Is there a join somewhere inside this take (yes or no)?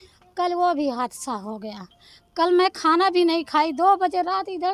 no